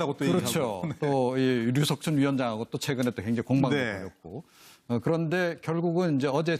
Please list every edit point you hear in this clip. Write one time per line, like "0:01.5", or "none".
none